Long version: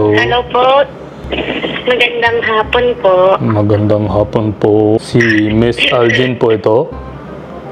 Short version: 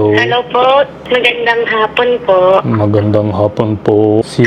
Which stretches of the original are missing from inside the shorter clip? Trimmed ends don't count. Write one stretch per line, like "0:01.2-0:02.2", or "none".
0:01.0-0:01.7